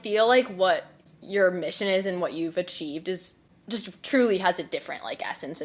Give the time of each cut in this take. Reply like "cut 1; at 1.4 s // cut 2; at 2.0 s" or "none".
none